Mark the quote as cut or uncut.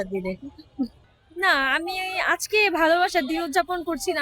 cut